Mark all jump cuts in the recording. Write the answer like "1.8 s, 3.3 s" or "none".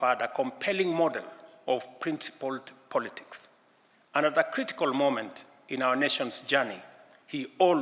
none